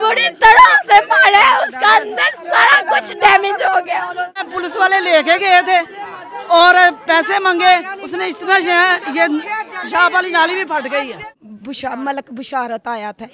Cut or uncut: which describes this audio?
cut